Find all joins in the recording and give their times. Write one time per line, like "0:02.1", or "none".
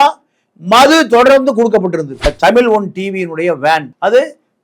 0:02.3